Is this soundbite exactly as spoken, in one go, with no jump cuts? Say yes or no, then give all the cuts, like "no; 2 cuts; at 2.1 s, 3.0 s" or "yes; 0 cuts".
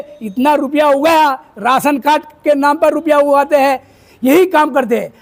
yes; 0 cuts